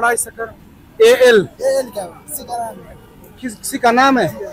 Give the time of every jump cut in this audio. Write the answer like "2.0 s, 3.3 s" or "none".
none